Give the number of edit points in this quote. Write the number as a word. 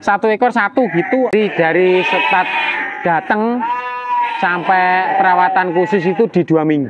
one